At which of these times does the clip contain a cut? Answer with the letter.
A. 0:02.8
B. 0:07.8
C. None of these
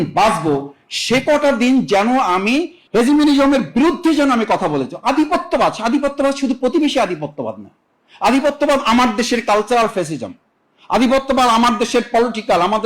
A